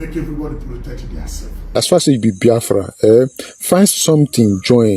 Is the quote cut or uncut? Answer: cut